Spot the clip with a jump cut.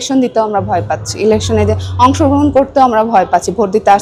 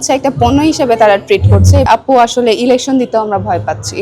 second; 1 cut; at 1.9 s

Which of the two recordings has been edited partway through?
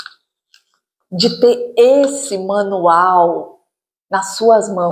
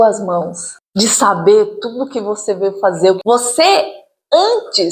second; 1 cut; at 3.2 s

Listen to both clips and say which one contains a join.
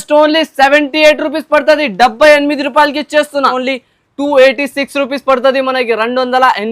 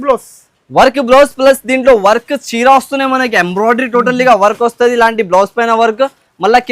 first; 1 cut; at 3.5 s

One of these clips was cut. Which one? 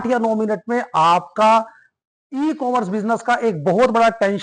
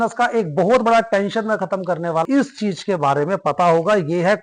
second; 1 cut; at 2.2 s

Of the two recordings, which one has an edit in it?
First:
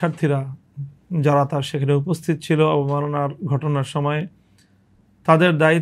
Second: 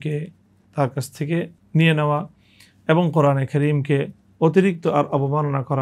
second; 1 cut; at 1.6 s

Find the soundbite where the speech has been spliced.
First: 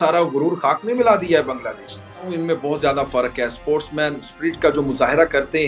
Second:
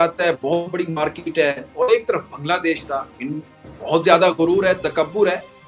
first; 1 cut; at 2.2 s

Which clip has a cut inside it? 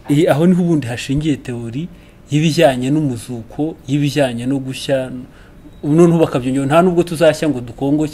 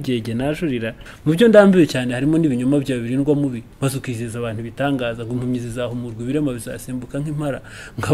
second; 1 cut; at 1.0 s

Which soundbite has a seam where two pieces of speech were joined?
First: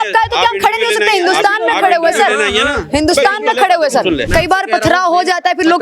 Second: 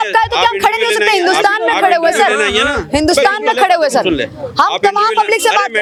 first; 1 cut; at 4.3 s

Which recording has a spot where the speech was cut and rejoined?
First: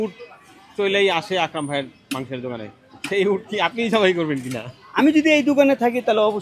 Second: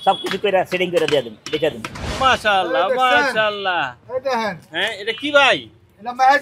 second; 1 cut; at 2.0 s

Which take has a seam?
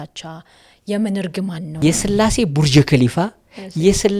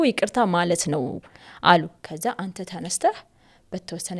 first; 1 cut; at 1.7 s

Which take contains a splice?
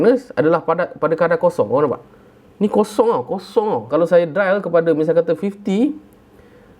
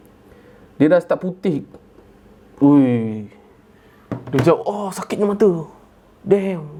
first; 1 cut; at 3.9 s

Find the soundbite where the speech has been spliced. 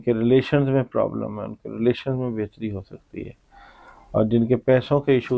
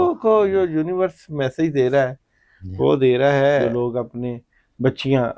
second; 1 cut; at 3.7 s

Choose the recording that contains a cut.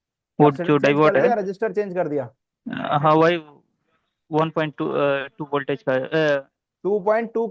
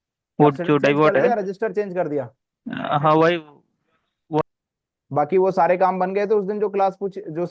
second; 1 cut; at 4.4 s

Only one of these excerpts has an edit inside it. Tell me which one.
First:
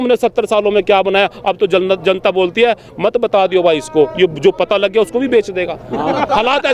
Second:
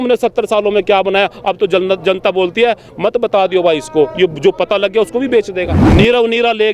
second; 1 cut; at 5.8 s

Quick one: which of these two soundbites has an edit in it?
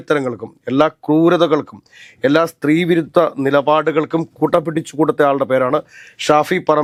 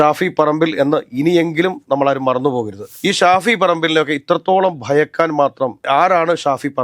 second; 1 cut; at 2.8 s

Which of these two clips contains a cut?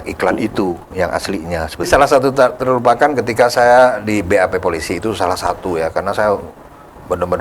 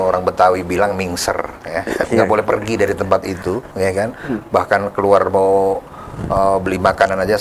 first; 1 cut; at 1.9 s

